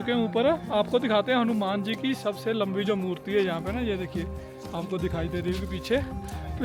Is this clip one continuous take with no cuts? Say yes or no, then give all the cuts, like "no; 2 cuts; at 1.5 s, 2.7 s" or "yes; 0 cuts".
yes; 0 cuts